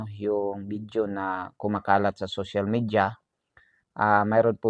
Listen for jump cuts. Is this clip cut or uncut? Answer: uncut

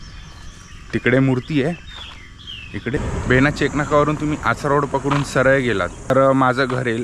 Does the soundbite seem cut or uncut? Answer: cut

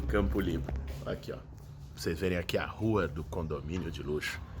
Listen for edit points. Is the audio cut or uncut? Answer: cut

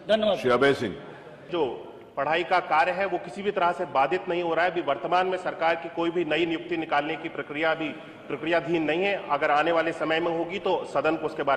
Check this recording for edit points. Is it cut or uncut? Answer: cut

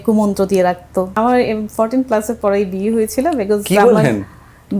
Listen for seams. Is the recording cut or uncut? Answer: cut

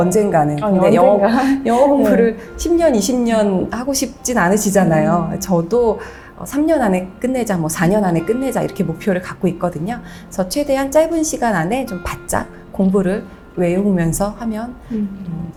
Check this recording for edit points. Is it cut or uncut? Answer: uncut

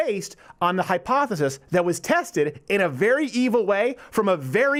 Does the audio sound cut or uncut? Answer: uncut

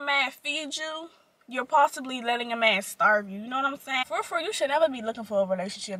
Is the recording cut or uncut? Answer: cut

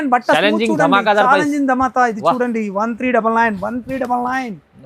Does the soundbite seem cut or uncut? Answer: uncut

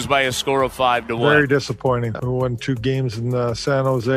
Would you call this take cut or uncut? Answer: cut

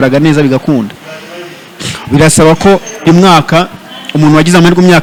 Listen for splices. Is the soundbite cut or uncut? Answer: uncut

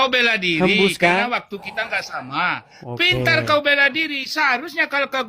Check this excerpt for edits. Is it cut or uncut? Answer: uncut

